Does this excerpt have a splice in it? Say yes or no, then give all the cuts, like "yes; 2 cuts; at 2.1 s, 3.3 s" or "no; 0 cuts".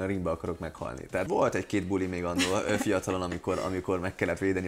yes; 1 cut; at 1.3 s